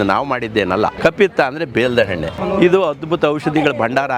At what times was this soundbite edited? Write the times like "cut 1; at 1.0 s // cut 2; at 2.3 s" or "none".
cut 1; at 0.9 s // cut 2; at 2.6 s